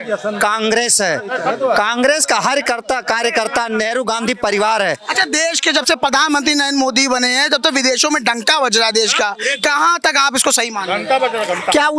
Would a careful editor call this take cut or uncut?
uncut